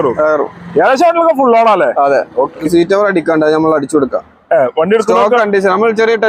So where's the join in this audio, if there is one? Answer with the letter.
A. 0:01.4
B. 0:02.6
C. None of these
B